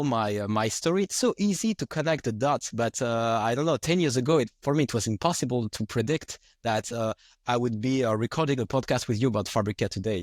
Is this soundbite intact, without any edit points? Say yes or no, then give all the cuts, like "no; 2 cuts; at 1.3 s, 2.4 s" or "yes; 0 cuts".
yes; 0 cuts